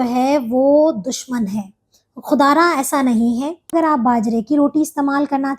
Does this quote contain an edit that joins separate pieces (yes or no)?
yes